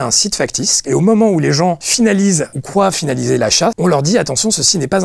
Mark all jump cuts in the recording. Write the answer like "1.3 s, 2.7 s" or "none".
0.8 s, 3.8 s